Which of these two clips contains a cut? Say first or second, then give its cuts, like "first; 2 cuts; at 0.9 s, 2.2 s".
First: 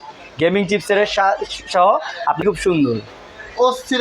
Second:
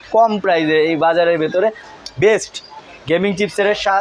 first; 1 cut; at 2.4 s